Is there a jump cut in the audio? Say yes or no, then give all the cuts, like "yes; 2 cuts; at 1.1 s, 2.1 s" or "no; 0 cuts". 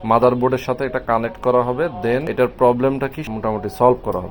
yes; 2 cuts; at 2.3 s, 3.2 s